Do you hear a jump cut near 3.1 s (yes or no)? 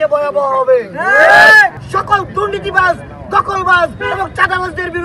no